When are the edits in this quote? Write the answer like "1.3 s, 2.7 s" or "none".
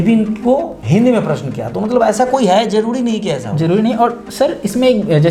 none